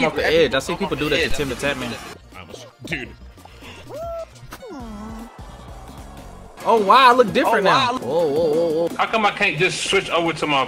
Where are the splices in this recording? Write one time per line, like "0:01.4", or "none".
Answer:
none